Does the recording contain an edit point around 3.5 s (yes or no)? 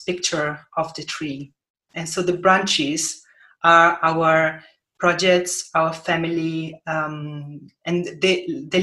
no